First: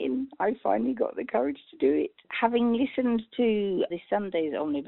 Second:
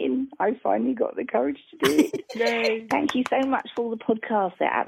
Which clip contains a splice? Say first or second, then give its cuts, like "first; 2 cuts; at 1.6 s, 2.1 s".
first; 2 cuts; at 2.0 s, 3.9 s